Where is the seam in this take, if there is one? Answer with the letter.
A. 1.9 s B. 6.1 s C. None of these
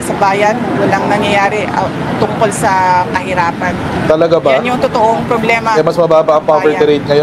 C